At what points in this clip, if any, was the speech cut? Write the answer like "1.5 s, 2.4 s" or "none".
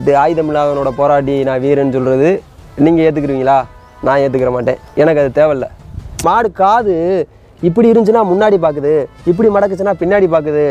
6.2 s